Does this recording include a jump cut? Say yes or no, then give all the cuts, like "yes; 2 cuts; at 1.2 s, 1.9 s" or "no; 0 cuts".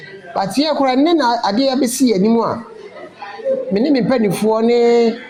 no; 0 cuts